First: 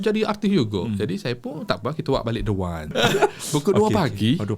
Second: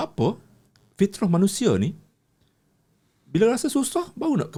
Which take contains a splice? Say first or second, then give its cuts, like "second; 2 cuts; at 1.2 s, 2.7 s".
first; 1 cut; at 2.9 s